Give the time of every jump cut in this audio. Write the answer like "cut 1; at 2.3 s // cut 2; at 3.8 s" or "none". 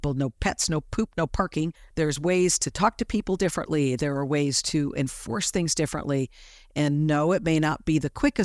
cut 1; at 1.8 s